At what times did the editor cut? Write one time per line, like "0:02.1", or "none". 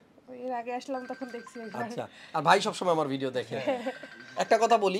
none